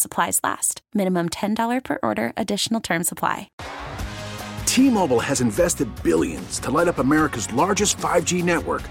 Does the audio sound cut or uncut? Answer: cut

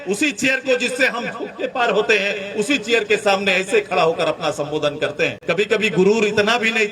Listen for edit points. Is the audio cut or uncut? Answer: cut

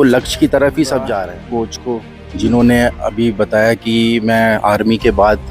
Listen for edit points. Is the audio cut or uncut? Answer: cut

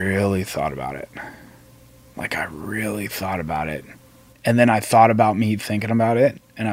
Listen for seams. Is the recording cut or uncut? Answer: uncut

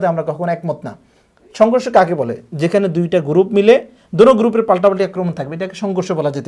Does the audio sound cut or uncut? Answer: uncut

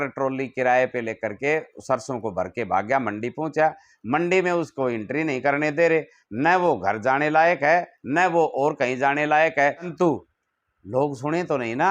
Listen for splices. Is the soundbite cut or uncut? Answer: cut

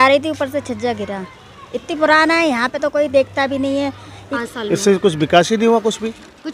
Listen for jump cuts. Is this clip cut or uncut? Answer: cut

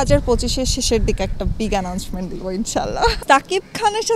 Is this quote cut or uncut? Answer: cut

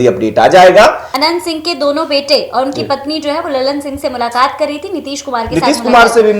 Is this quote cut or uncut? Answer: cut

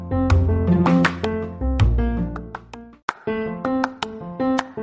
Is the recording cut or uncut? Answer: cut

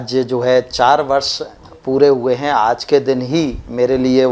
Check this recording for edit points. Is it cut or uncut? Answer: uncut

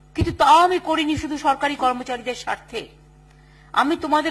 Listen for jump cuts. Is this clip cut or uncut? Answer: uncut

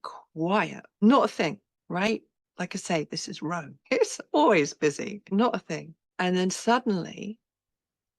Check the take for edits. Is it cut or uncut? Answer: cut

